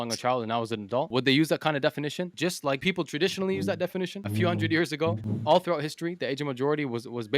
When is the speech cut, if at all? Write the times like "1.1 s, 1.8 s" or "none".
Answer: 1.1 s, 2.8 s, 4.2 s, 5.3 s